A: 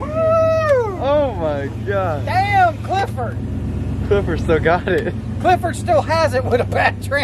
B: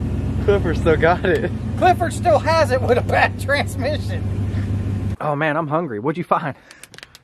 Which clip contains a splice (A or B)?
B